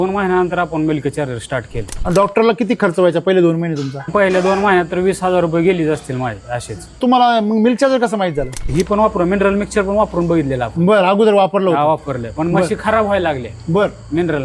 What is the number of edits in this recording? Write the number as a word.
four